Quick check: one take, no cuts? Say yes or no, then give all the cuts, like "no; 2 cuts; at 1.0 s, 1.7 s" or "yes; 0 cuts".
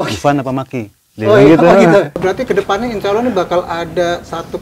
no; 1 cut; at 2.1 s